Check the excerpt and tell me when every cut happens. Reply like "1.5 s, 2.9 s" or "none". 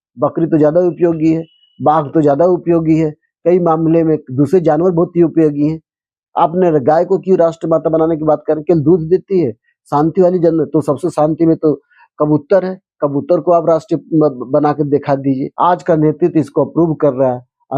15.5 s